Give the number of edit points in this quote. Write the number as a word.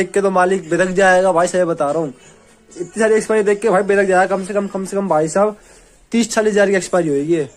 zero